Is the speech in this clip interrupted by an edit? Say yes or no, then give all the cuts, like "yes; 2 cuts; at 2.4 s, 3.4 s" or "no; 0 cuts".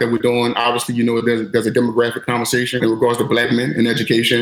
yes; 1 cut; at 2.8 s